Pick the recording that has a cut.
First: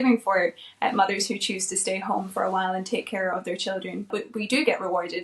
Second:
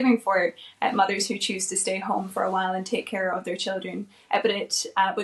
first; 1 cut; at 4.1 s

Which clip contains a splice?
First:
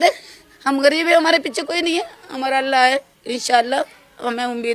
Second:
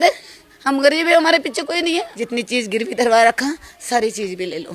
second; 1 cut; at 2.2 s

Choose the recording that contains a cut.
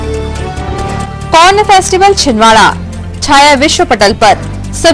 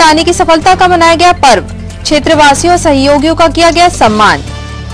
first; 1 cut; at 1.1 s

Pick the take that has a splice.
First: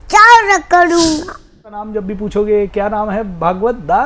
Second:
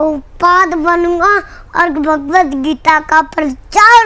first; 1 cut; at 1.8 s

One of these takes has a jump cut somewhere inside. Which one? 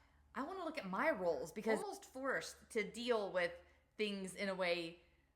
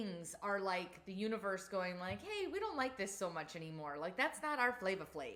first; 1 cut; at 1.9 s

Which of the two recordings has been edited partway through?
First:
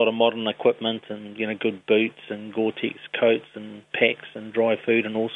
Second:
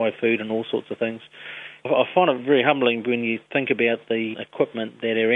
second; 3 cuts; at 1.9 s, 3.4 s, 4.3 s

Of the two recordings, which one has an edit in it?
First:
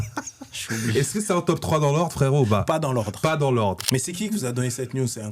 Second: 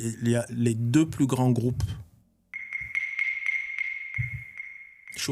first; 1 cut; at 3.8 s

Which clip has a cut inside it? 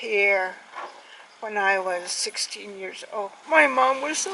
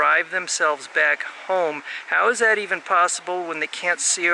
first; 1 cut; at 3.4 s

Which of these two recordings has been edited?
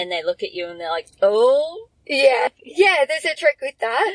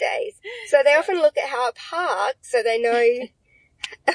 first; 1 cut; at 2.5 s

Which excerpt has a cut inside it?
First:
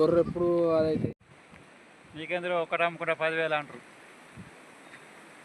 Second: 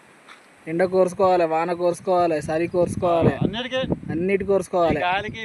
first; 1 cut; at 1.1 s

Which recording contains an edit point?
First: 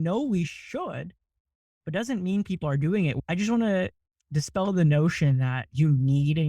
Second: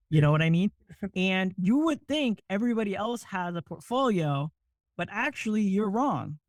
first; 1 cut; at 3.2 s

